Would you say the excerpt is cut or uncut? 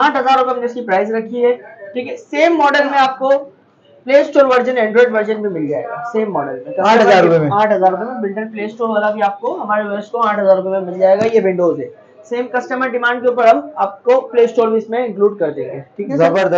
uncut